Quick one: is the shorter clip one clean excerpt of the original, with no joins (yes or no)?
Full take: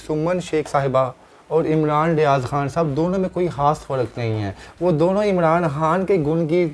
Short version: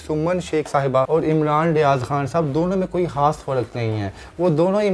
no